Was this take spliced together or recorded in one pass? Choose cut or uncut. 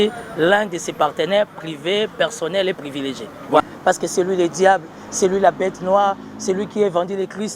cut